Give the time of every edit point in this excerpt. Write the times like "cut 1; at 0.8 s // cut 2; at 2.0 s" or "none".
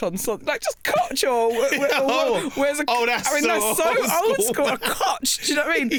none